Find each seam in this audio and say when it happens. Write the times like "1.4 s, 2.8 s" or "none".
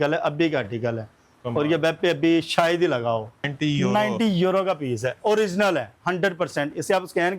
3.5 s